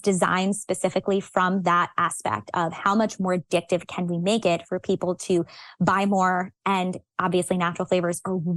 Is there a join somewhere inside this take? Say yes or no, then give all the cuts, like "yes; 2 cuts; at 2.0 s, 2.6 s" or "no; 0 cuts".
yes; 1 cut; at 3.2 s